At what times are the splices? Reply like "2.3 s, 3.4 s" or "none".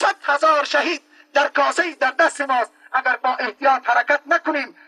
none